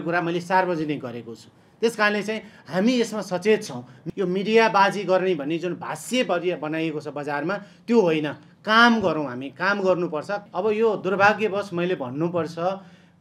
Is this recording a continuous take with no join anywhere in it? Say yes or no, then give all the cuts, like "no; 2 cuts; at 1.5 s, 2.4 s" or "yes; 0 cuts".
no; 2 cuts; at 3.9 s, 10.4 s